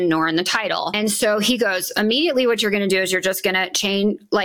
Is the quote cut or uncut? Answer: cut